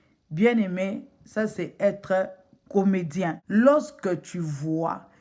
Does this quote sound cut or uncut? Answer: cut